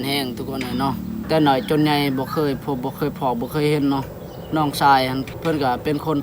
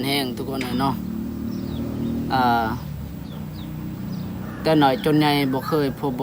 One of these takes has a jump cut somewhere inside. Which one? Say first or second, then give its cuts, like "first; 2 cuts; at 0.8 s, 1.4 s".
first; 2 cuts; at 1.2 s, 5.3 s